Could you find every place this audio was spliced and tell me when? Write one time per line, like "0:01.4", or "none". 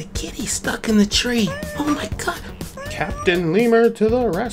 none